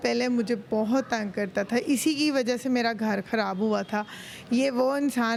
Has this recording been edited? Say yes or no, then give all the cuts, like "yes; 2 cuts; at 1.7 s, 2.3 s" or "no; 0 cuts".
no; 0 cuts